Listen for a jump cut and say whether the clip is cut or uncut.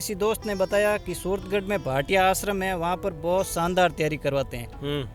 uncut